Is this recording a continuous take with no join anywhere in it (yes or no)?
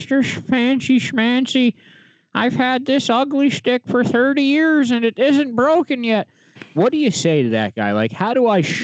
yes